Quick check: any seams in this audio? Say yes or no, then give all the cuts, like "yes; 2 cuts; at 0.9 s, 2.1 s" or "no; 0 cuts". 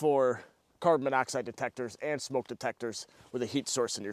no; 0 cuts